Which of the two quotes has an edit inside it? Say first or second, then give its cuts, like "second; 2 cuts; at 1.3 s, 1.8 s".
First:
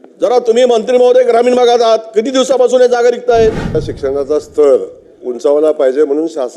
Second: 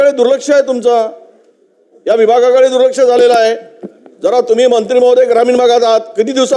first; 1 cut; at 3.9 s